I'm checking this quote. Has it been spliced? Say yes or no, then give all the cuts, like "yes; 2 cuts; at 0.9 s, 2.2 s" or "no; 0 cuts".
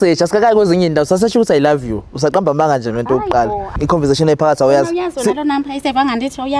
yes; 1 cut; at 3.7 s